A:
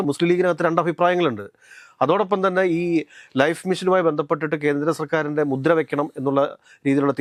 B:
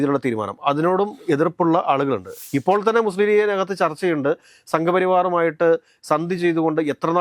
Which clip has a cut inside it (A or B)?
B